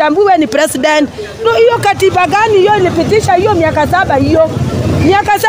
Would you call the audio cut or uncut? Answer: cut